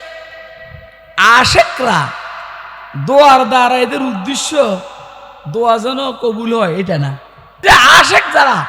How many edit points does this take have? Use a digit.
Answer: 1